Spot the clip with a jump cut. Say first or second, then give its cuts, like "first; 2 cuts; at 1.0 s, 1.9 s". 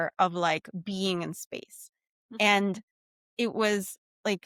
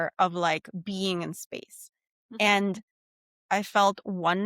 second; 1 cut; at 3.3 s